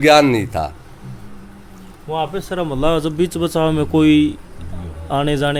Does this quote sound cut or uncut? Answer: uncut